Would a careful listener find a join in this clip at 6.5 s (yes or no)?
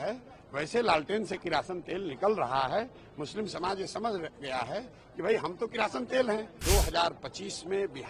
yes